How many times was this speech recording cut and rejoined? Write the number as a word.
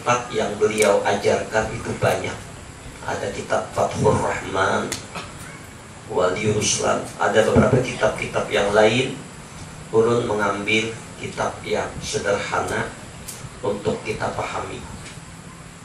zero